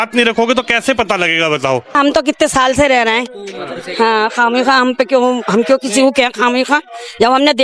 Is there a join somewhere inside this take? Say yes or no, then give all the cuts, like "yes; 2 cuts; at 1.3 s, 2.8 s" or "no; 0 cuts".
yes; 1 cut; at 1.9 s